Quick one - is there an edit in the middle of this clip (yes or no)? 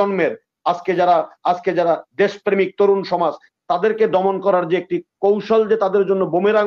no